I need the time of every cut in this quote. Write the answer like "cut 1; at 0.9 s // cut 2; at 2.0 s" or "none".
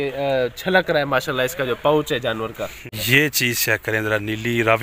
cut 1; at 2.7 s

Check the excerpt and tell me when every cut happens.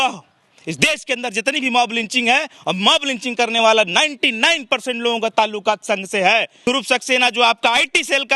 cut 1; at 6.6 s

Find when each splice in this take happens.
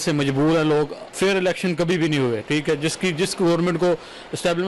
cut 1; at 1.0 s

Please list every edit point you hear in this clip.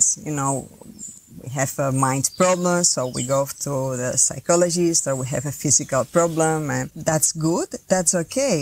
none

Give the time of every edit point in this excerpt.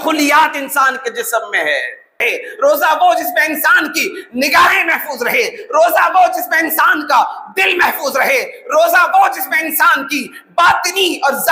cut 1; at 2.2 s

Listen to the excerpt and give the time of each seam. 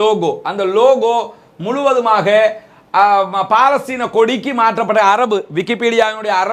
none

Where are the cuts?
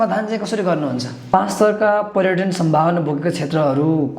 cut 1; at 1.2 s

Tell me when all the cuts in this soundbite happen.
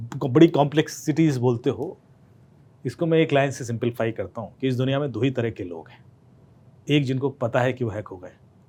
none

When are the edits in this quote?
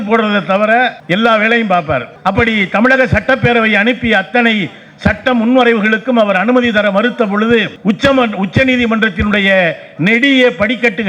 none

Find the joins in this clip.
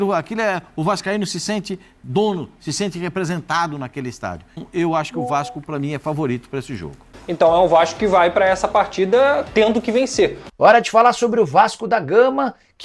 cut 1; at 4.7 s // cut 2; at 7.0 s // cut 3; at 10.4 s

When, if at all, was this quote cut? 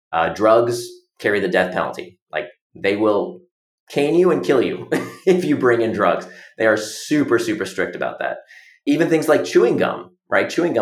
none

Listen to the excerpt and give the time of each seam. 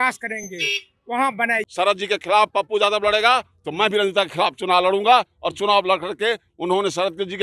cut 1; at 1.6 s

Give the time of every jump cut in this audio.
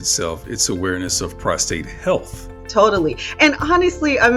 cut 1; at 2.6 s

